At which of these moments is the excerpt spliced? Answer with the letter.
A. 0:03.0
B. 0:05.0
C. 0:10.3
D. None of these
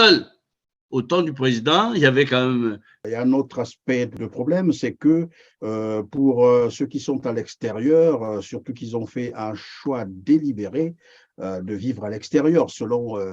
A